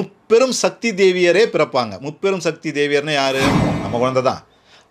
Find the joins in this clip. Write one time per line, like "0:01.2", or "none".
0:03.7